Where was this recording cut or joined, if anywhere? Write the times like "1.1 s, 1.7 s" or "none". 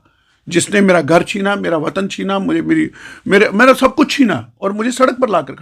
none